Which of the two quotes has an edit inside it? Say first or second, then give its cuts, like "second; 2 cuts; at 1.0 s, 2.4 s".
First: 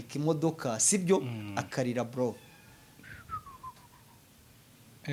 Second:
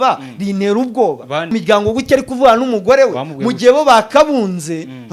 second; 1 cut; at 1.5 s